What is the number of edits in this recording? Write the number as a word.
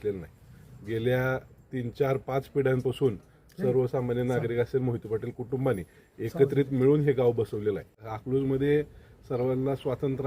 one